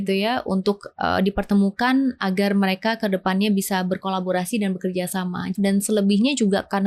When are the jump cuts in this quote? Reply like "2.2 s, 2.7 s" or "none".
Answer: 5.5 s

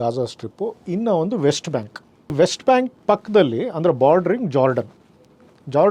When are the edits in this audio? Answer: 2.3 s

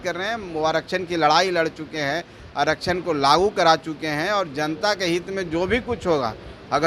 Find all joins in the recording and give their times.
none

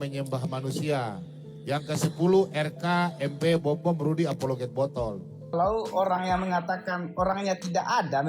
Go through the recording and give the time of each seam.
5.5 s

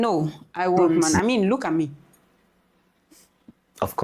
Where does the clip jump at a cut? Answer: 1.0 s

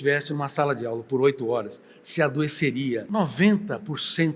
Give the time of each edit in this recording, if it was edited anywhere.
3.0 s

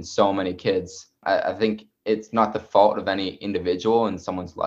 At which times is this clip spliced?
1.2 s

